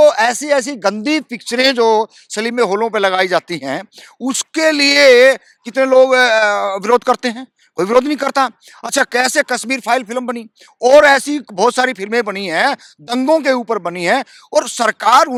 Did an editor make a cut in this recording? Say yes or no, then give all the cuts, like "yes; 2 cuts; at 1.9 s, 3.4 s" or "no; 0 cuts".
no; 0 cuts